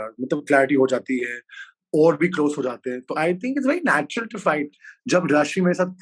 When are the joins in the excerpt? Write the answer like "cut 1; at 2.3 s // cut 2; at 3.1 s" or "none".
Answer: cut 1; at 4.9 s